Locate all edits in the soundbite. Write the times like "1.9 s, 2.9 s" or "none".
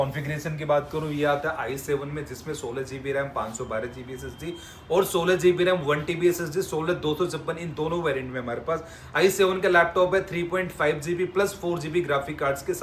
none